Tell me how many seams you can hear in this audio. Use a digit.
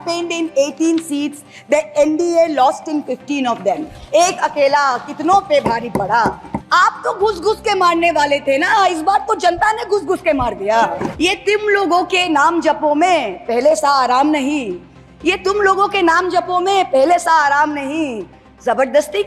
2